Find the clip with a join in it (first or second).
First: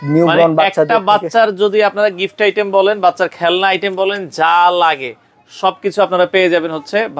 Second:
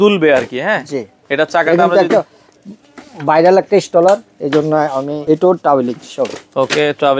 second